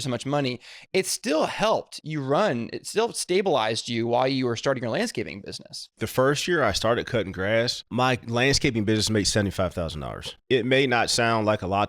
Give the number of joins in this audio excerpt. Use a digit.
3